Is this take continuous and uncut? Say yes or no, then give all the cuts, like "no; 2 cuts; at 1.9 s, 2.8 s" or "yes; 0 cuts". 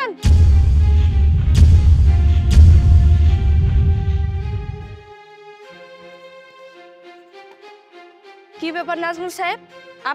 yes; 0 cuts